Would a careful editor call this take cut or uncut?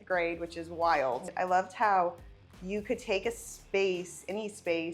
cut